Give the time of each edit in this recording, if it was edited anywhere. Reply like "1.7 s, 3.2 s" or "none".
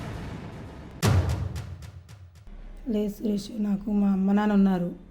none